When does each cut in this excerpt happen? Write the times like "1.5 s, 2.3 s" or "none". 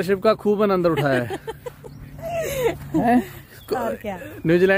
none